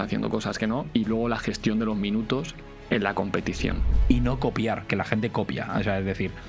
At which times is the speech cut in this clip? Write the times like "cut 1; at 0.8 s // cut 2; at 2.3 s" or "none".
cut 1; at 3.9 s